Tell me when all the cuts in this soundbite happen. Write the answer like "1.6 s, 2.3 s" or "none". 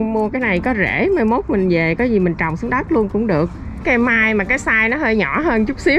3.8 s